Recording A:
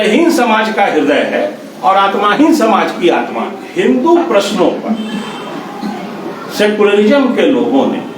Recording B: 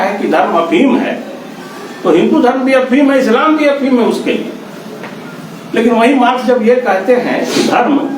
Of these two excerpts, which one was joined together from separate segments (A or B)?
A